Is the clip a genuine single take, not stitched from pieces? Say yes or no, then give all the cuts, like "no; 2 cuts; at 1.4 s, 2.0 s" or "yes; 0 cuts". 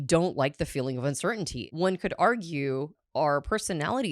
no; 2 cuts; at 1.6 s, 3.0 s